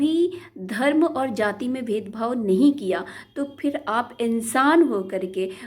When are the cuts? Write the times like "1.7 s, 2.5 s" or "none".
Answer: none